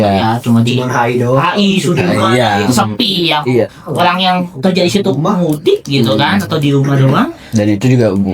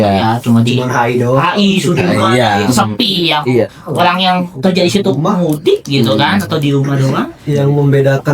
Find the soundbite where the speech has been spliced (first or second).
second